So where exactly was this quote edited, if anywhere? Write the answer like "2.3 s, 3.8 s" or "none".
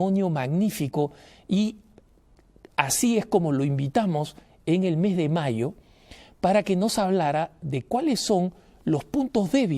3.5 s